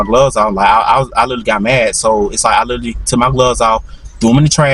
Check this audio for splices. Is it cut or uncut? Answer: uncut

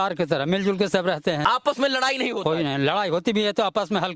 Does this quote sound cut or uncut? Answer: cut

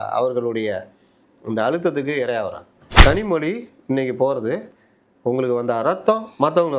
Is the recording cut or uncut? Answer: cut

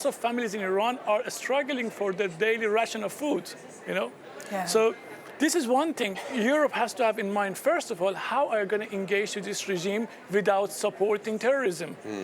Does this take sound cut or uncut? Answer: uncut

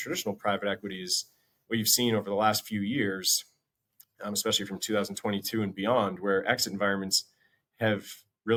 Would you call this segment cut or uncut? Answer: uncut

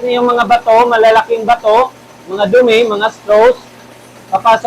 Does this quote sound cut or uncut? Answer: uncut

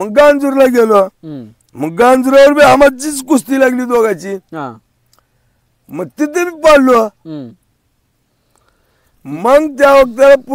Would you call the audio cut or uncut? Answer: uncut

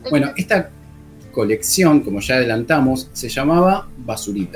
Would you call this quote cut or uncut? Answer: uncut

